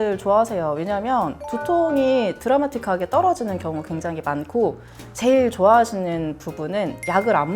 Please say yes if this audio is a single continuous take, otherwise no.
yes